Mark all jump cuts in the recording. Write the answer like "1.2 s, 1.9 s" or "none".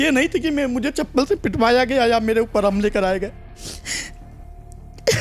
none